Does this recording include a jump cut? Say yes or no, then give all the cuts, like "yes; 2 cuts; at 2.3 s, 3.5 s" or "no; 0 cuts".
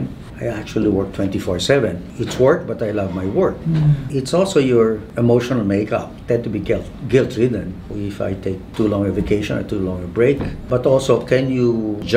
yes; 1 cut; at 2.1 s